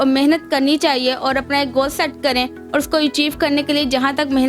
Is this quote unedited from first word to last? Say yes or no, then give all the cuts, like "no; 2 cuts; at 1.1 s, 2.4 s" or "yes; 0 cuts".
yes; 0 cuts